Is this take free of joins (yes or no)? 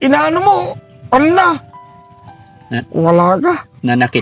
yes